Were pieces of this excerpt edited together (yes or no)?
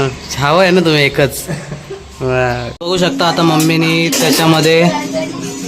yes